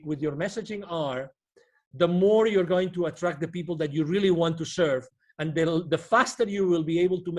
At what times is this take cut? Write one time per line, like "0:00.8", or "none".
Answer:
none

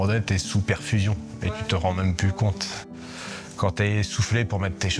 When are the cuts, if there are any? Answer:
0:02.8

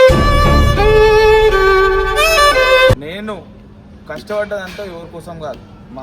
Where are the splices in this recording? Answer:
0:02.9

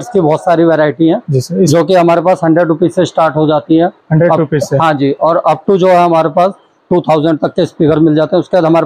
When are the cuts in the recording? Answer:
none

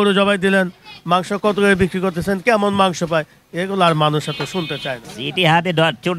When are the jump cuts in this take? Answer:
0:05.1

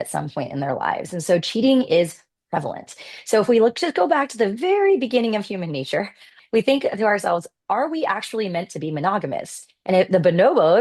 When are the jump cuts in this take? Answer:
0:06.3

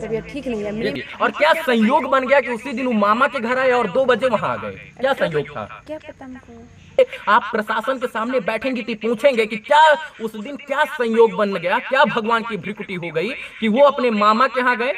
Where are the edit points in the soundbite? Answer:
0:01.0
0:07.0

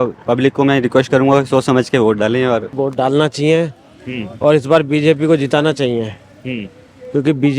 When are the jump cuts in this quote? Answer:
0:02.8

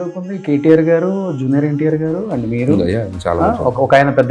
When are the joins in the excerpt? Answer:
none

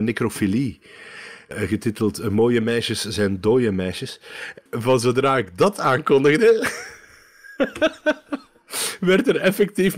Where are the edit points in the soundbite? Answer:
0:01.5
0:04.6

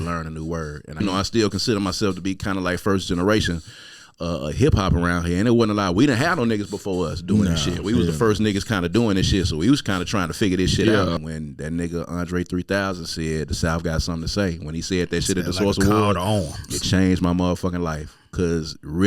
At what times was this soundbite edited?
0:01.0
0:11.2

